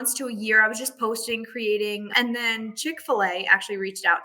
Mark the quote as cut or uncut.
cut